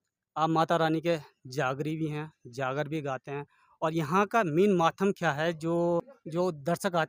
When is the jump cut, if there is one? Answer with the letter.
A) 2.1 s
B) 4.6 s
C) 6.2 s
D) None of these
C